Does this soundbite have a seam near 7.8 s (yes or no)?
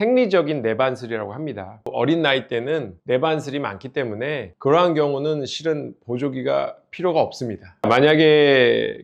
yes